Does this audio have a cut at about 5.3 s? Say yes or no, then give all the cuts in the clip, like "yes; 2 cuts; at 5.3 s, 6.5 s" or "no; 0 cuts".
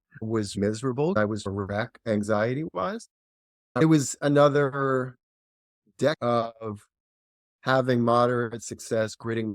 no; 2 cuts; at 1.2 s, 3.8 s